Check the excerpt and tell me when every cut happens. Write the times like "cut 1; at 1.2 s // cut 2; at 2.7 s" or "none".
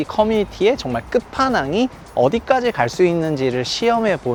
none